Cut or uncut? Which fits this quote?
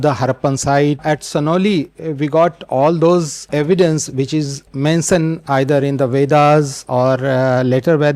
cut